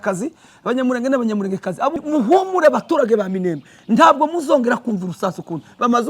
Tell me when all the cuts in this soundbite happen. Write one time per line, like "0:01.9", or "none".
0:02.0

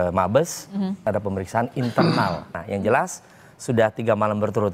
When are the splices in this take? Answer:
0:01.1
0:02.6

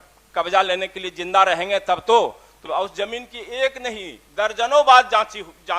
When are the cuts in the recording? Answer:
0:02.6

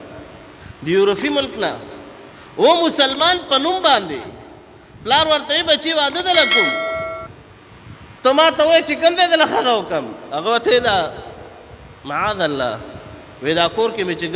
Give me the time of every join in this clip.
none

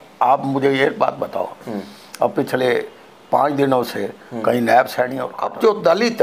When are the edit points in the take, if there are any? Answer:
0:05.3

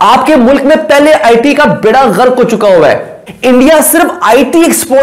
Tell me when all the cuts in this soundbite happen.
0:03.1

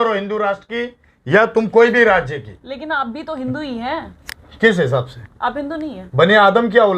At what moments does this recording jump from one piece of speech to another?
none

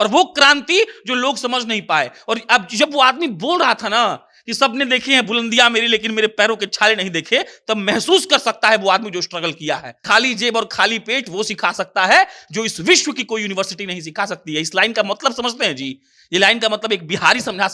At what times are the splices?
0:10.0

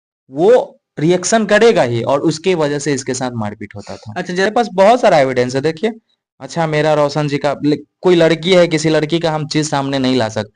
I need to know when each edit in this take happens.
0:04.4

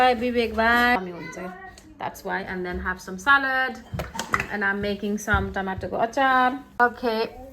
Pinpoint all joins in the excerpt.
0:01.0

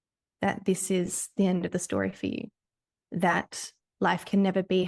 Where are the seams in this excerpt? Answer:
none

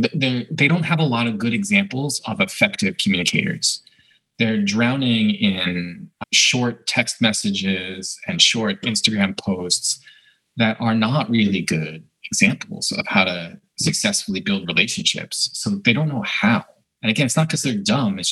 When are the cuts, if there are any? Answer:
0:16.9

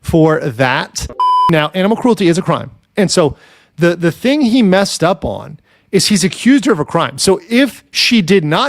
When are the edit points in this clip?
0:01.3

